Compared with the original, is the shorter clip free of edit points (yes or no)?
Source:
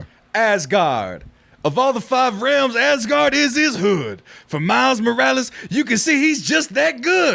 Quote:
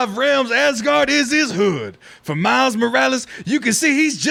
yes